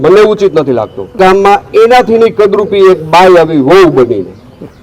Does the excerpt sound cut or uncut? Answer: cut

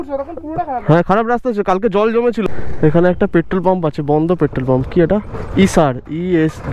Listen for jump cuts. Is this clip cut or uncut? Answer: cut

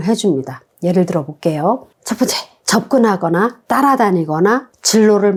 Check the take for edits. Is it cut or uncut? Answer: uncut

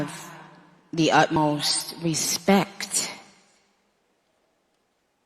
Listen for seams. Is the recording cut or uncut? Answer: cut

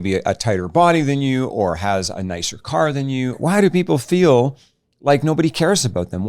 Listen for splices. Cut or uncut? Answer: cut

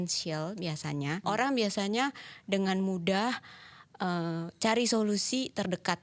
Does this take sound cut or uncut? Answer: cut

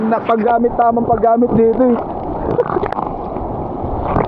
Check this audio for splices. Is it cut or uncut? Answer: uncut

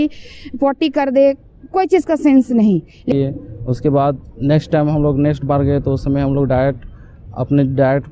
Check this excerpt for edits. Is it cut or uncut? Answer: cut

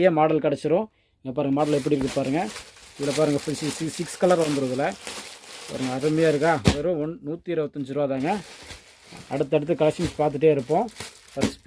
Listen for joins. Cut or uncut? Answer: uncut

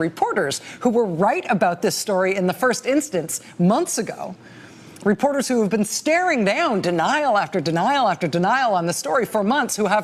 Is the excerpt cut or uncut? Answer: cut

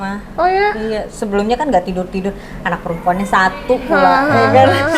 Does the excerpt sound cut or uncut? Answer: uncut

